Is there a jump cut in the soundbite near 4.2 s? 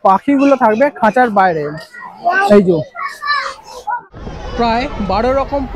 yes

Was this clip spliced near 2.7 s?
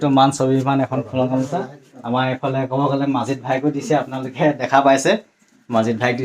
no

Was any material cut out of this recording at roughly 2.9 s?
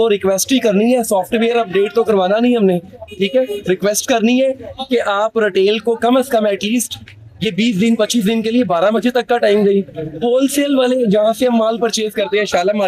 no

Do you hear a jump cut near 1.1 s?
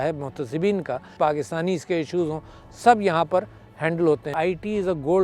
yes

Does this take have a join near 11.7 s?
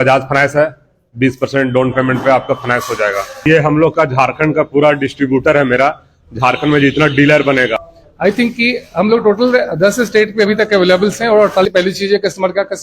yes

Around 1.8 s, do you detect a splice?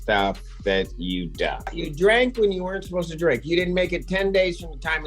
yes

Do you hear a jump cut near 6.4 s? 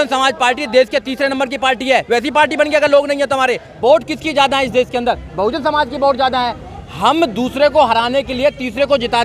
no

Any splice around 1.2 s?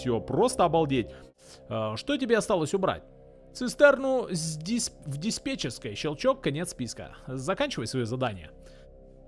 yes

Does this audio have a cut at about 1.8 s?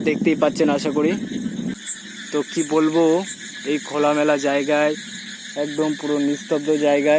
yes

